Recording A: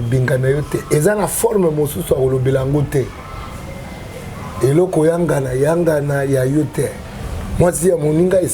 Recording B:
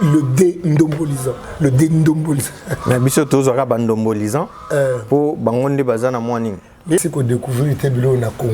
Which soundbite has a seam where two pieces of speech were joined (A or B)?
B